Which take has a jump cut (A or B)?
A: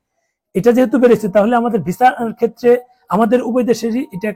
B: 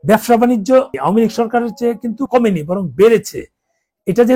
B